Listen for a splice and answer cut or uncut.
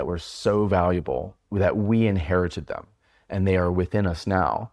cut